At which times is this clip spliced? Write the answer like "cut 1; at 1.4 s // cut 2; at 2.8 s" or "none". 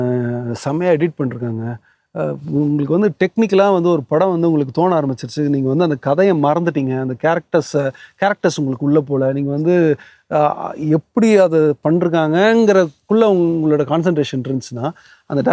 none